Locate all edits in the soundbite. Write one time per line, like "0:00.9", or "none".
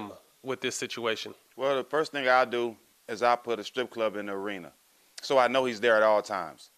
0:01.4